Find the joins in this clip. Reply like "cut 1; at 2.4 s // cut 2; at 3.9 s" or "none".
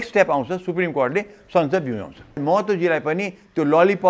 cut 1; at 2.4 s